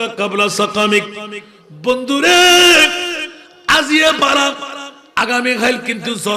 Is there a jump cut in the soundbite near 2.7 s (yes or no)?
no